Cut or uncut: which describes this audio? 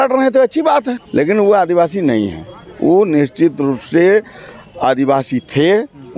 cut